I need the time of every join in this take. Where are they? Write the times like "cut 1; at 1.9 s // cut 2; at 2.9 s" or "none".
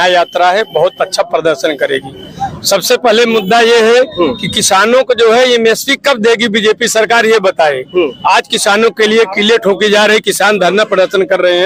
none